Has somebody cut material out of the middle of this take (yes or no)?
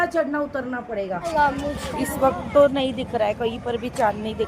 yes